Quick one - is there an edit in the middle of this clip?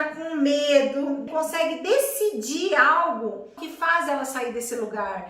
yes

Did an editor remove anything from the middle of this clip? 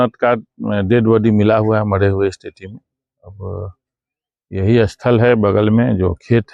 no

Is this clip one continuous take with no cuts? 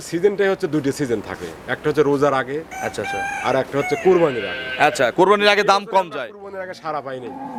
yes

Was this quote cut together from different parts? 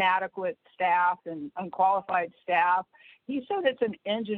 no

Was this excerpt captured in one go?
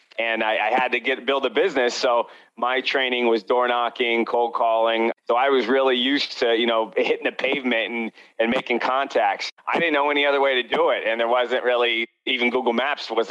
no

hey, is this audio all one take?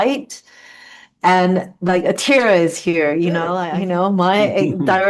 no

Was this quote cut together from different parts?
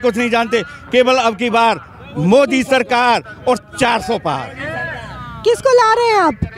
no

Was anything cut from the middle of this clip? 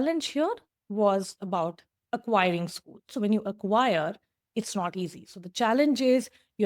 no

